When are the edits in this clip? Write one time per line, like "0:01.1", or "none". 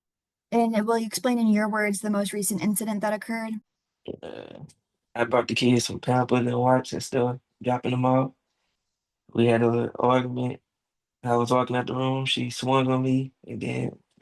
0:03.8